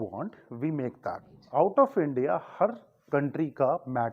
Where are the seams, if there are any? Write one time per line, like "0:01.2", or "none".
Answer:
0:01.4